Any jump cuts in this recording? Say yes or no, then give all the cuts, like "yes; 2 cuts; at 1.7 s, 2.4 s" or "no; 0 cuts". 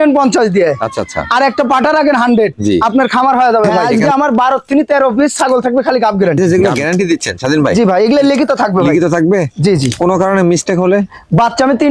yes; 2 cuts; at 3.8 s, 6.4 s